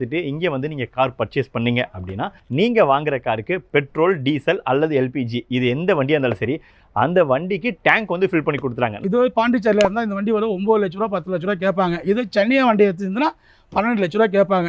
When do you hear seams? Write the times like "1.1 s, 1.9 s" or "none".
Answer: 9.0 s